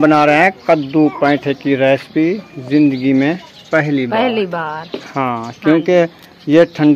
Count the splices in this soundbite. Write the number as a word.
zero